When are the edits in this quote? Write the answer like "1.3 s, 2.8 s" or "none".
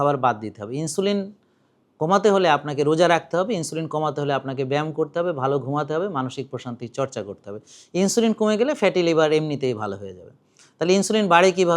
none